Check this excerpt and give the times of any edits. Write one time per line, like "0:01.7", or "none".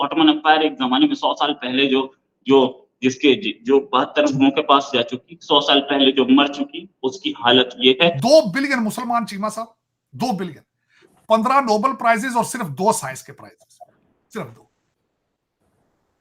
0:08.2